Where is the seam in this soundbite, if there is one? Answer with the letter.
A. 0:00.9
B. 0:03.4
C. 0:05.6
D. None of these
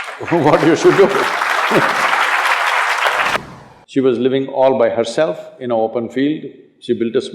B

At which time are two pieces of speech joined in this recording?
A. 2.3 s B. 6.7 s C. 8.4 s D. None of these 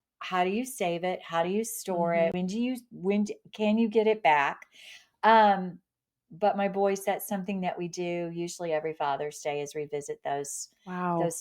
A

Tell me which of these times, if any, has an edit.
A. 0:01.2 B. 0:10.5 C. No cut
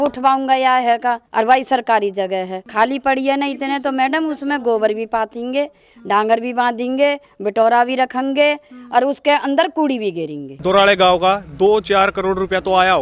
B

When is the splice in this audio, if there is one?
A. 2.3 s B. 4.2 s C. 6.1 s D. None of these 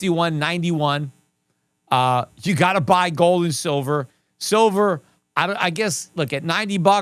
B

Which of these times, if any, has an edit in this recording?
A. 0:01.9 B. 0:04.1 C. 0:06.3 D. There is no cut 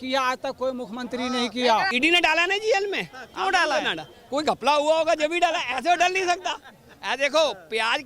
A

